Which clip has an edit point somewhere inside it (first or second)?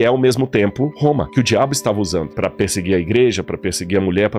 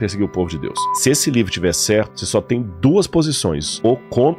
second